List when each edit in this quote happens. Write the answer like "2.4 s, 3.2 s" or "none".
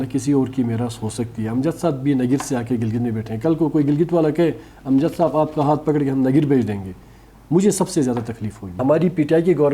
8.8 s